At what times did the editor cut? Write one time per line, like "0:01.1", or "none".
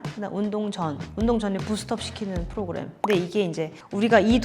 0:02.9